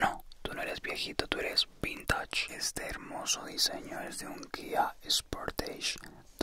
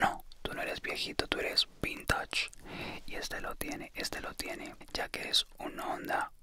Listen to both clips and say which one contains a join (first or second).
first